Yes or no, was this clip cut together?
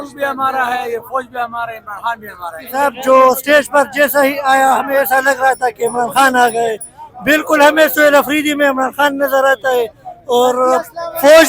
yes